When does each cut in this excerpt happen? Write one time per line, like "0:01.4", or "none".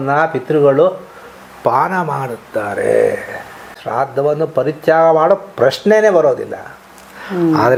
none